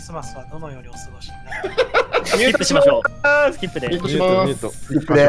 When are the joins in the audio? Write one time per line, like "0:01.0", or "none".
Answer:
none